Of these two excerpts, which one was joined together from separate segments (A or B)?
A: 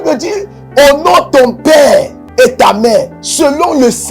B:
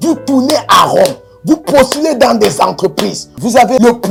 A